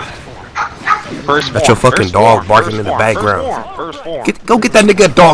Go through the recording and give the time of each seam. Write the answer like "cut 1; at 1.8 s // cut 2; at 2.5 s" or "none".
cut 1; at 1.7 s

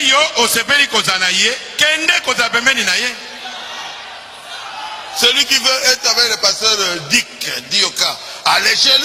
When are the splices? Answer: none

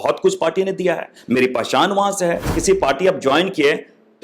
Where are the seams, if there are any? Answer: cut 1; at 2.5 s

